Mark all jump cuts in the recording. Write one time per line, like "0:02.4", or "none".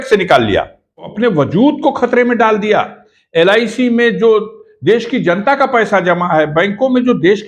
0:01.1